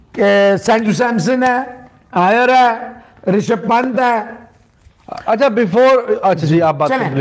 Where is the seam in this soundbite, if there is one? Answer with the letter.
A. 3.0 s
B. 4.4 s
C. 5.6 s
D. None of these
D